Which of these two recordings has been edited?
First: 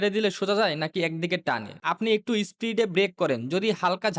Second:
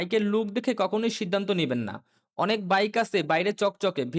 first; 1 cut; at 1.7 s

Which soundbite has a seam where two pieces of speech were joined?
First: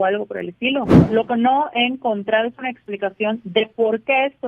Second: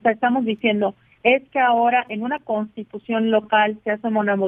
first; 1 cut; at 1.0 s

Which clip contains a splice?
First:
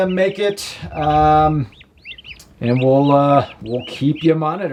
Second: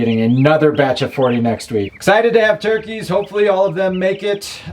second; 1 cut; at 1.9 s

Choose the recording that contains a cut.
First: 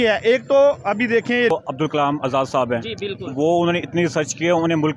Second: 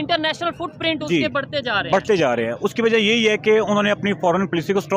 first; 1 cut; at 1.5 s

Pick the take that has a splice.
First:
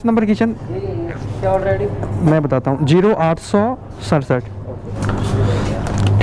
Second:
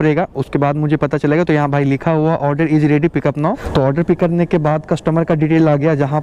second; 1 cut; at 3.6 s

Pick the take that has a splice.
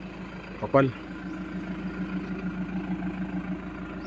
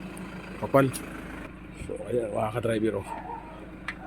second; 1 cut; at 1.0 s

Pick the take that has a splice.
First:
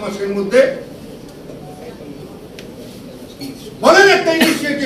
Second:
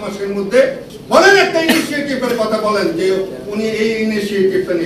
second; 1 cut; at 0.9 s

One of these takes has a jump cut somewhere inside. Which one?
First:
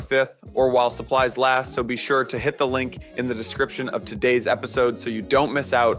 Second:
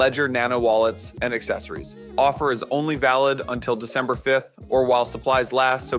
second; 1 cut; at 2.0 s

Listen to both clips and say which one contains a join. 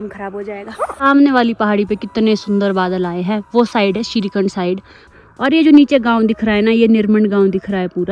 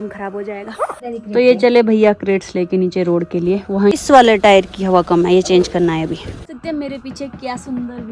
second; 3 cuts; at 0.9 s, 4.0 s, 6.5 s

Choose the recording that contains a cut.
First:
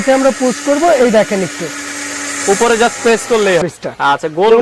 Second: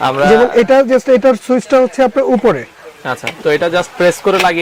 first; 1 cut; at 3.6 s

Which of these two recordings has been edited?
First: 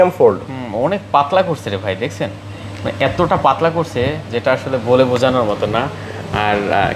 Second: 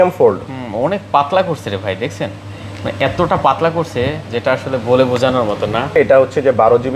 second; 1 cut; at 6.0 s

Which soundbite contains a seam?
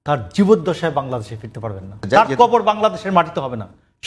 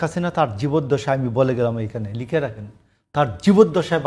first; 1 cut; at 2.0 s

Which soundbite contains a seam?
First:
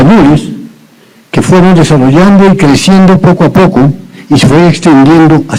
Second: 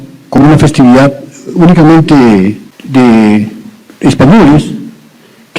second; 1 cut; at 2.7 s

